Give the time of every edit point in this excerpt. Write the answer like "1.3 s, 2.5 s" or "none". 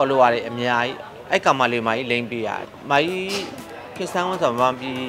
2.6 s